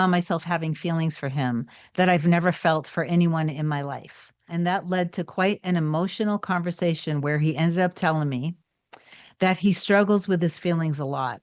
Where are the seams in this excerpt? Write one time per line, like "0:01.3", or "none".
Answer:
0:04.5